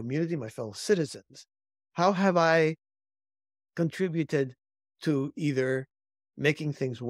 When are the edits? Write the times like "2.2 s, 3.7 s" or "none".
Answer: none